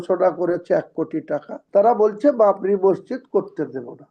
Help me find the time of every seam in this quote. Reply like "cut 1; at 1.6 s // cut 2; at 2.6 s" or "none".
cut 1; at 1.5 s